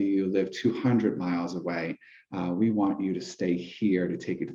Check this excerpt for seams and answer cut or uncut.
uncut